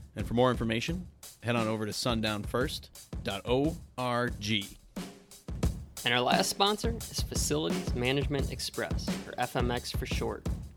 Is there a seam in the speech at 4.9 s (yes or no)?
yes